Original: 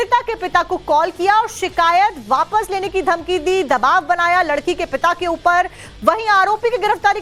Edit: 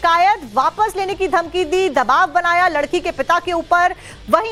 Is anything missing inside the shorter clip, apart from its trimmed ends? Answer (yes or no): no